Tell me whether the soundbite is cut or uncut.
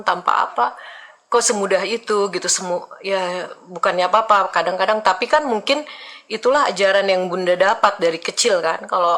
cut